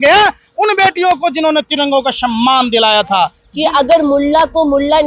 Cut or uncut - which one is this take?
cut